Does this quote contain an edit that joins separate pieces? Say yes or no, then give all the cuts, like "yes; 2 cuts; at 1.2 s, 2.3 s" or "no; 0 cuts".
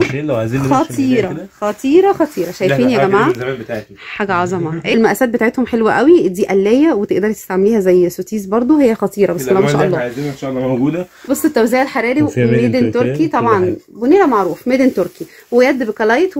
yes; 2 cuts; at 4.9 s, 11.2 s